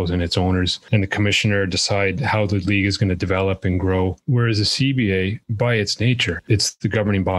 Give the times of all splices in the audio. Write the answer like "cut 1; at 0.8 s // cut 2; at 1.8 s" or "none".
cut 1; at 4.2 s // cut 2; at 5.4 s // cut 3; at 6.4 s